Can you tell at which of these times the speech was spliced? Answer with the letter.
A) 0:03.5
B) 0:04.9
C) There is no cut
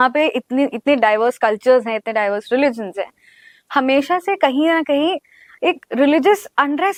C